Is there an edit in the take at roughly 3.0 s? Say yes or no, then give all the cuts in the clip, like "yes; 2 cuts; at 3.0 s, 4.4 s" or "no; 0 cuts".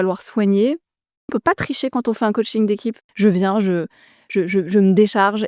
yes; 2 cuts; at 1.3 s, 3.0 s